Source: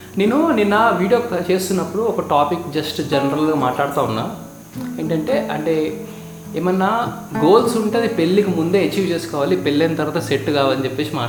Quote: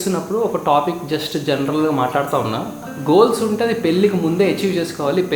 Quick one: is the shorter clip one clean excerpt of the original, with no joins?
no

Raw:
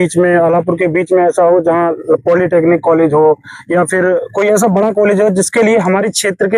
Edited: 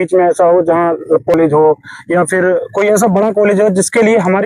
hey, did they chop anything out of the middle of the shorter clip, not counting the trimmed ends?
yes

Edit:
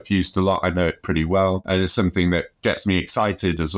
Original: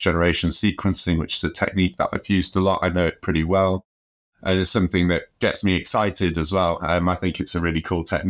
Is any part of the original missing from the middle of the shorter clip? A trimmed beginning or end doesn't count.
yes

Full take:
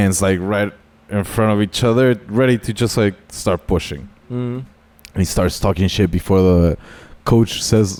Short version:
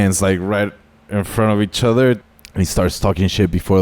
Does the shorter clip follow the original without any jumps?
no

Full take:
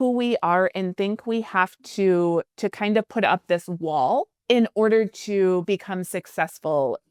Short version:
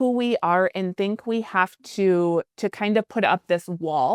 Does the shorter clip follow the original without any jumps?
yes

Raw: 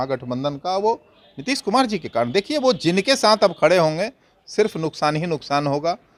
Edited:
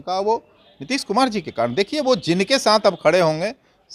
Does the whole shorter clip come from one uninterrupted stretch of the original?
yes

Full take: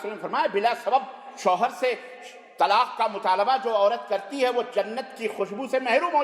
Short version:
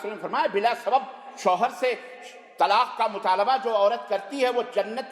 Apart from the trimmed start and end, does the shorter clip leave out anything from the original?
no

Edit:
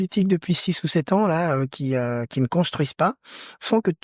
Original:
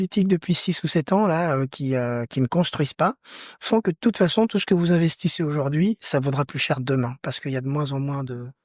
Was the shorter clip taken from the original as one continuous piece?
yes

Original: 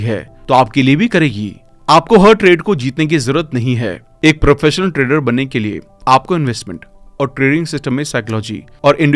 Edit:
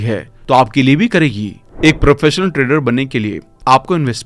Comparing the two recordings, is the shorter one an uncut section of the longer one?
no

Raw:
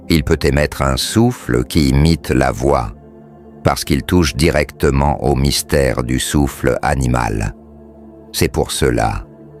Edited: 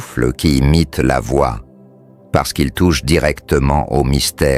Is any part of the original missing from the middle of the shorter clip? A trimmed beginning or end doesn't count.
no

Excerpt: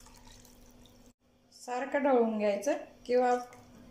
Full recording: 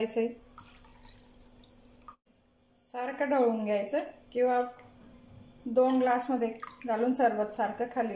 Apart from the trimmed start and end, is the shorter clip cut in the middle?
yes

